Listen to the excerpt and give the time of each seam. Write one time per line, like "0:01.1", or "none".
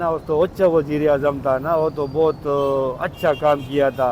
none